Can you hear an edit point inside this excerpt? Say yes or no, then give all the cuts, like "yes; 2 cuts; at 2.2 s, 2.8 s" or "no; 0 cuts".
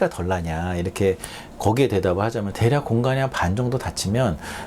yes; 1 cut; at 2.5 s